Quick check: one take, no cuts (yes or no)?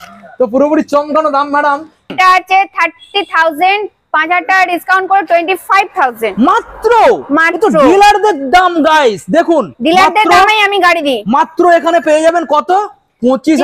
no